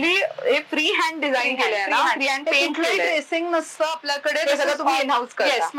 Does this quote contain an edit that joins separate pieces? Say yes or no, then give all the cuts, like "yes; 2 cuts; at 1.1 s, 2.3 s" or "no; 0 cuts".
no; 0 cuts